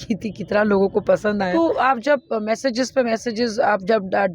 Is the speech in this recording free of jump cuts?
no; 1 cut; at 1.5 s

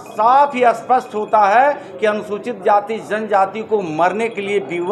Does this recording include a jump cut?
no; 0 cuts

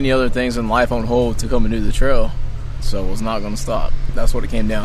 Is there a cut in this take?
yes; 2 cuts; at 2.8 s, 4.0 s

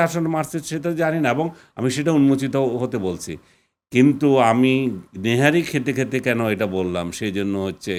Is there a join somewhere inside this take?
no; 0 cuts

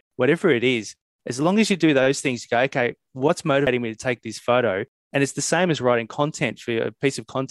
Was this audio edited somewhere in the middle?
yes; 1 cut; at 3.7 s

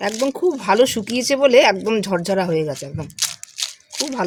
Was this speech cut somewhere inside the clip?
no; 0 cuts

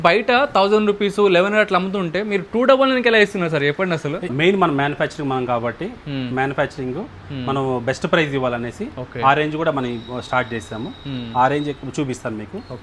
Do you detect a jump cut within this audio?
no; 0 cuts

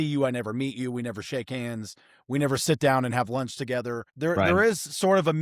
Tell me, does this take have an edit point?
yes; 1 cut; at 4.1 s

